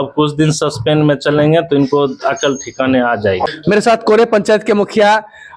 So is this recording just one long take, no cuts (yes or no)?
yes